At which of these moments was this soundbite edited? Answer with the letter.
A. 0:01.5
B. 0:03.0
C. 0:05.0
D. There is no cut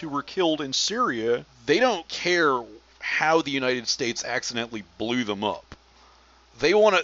A